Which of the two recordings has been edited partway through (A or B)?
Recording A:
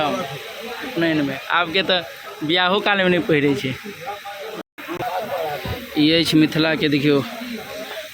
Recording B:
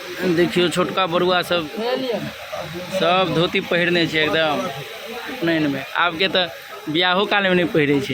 A